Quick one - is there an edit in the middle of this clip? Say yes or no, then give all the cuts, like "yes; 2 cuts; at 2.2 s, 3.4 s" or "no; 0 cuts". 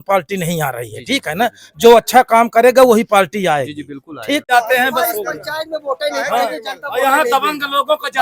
yes; 1 cut; at 4.5 s